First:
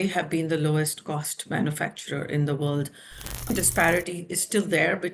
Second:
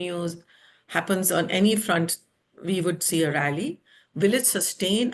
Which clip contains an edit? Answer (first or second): first